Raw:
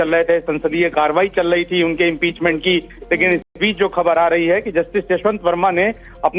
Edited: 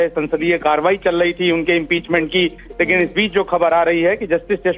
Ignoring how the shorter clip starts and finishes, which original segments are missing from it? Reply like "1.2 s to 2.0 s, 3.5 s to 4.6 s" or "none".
3.4 s to 3.6 s